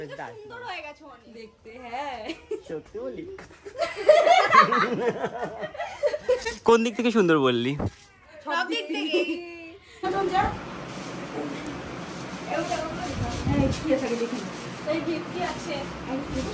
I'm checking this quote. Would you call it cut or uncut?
uncut